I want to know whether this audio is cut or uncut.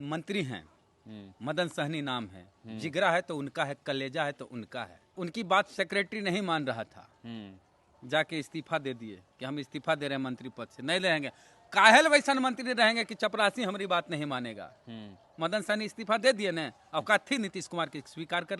cut